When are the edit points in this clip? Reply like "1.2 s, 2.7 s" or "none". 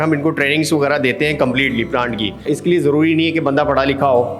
2.4 s